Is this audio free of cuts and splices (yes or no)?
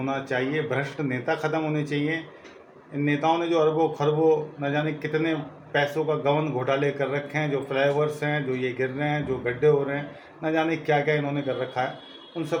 yes